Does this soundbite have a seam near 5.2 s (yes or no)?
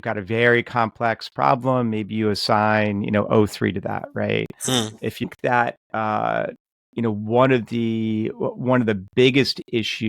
yes